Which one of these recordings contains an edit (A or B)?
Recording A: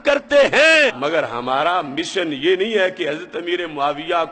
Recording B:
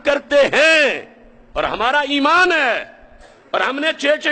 A